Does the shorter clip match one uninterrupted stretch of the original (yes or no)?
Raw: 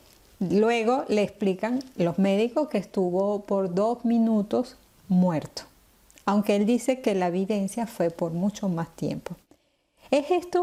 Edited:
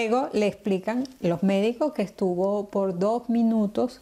yes